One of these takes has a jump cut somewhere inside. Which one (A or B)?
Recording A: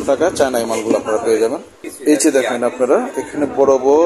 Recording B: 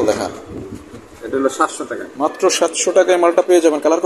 A